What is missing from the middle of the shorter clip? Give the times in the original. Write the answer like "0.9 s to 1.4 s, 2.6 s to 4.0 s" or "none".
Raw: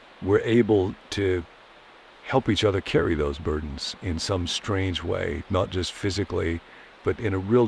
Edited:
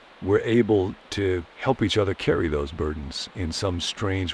1.5 s to 2.2 s